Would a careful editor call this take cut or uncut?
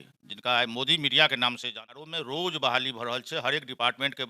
cut